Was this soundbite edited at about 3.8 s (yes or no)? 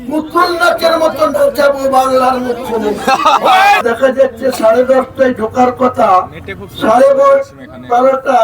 yes